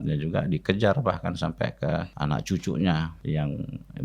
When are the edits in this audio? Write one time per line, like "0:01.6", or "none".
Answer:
0:02.1
0:03.2